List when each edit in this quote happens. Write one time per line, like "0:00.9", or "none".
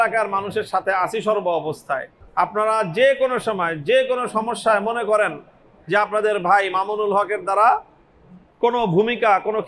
0:02.2